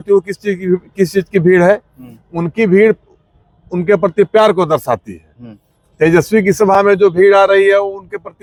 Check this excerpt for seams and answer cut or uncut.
uncut